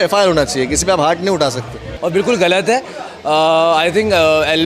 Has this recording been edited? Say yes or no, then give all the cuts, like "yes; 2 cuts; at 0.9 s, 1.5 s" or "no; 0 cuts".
yes; 1 cut; at 1.8 s